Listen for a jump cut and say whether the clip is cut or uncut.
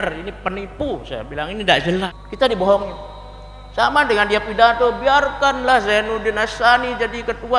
cut